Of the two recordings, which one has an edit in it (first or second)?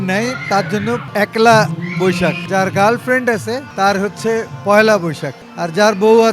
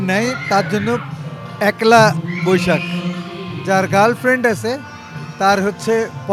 first